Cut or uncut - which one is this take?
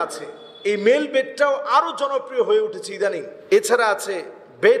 cut